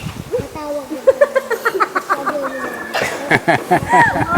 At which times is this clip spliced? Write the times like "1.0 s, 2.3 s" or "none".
none